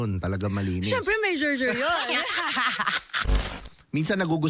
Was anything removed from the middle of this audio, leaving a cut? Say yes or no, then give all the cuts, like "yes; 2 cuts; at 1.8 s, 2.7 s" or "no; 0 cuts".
yes; 1 cut; at 3.3 s